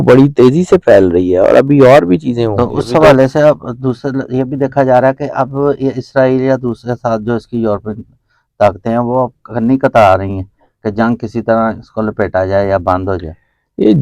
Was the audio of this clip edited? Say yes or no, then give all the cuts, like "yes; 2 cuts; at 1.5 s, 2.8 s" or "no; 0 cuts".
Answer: yes; 1 cut; at 2.5 s